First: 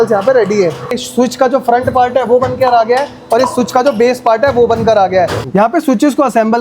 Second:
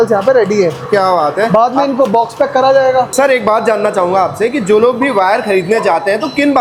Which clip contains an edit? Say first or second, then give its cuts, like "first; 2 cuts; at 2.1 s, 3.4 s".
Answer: first; 2 cuts; at 0.9 s, 5.4 s